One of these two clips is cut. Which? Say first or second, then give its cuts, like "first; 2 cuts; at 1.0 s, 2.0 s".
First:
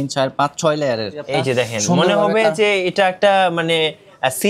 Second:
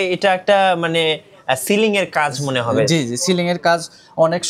first; 1 cut; at 1.2 s